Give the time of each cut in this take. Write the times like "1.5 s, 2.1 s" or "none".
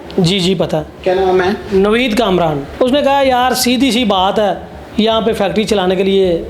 2.6 s